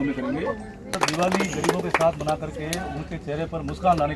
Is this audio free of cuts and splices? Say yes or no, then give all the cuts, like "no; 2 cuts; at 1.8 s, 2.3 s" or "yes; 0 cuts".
no; 1 cut; at 1.0 s